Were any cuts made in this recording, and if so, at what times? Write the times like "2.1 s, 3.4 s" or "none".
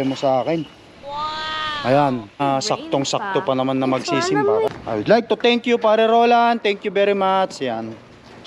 2.4 s, 4.7 s